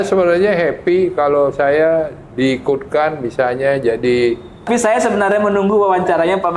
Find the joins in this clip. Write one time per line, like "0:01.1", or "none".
0:04.7